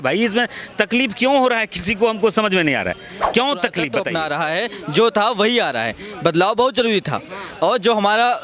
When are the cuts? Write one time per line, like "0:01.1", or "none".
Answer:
0:04.1